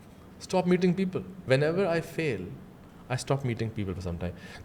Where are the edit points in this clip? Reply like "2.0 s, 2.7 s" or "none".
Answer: 1.3 s